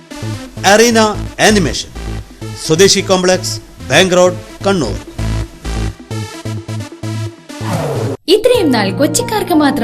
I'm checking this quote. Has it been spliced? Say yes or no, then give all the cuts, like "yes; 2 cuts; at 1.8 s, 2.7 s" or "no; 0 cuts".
yes; 1 cut; at 8.2 s